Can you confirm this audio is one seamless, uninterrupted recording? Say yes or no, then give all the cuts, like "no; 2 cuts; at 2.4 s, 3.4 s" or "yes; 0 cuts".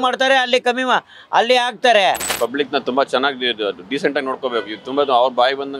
no; 1 cut; at 2.3 s